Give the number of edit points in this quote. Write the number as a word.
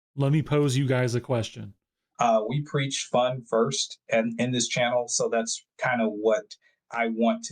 one